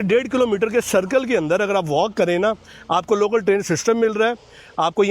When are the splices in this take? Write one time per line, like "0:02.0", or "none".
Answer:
none